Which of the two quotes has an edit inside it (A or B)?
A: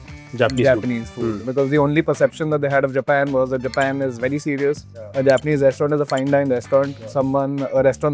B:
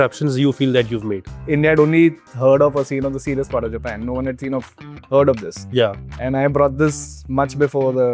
B